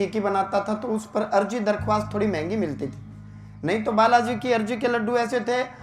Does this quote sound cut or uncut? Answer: uncut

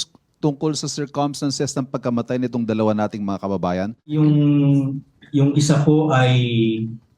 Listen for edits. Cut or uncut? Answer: cut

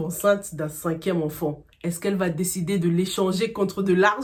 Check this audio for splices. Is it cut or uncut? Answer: uncut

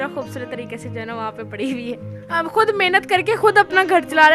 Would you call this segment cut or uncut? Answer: cut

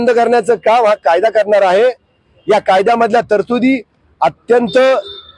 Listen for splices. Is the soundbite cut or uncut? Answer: uncut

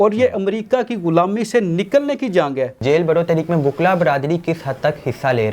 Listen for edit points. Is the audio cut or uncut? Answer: cut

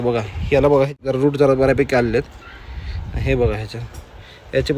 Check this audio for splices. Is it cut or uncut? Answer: cut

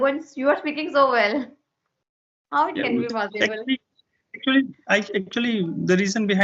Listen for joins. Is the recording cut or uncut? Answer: uncut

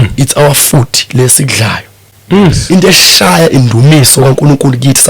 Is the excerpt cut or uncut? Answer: cut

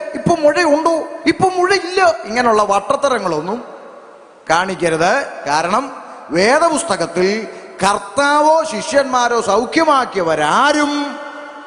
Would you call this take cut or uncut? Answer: uncut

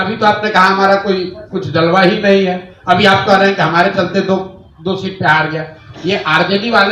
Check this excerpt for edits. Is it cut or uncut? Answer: uncut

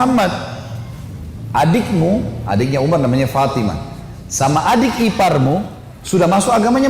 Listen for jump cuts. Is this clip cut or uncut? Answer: cut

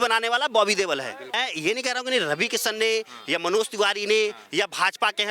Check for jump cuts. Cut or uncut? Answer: cut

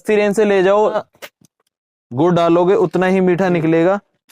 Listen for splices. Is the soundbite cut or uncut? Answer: cut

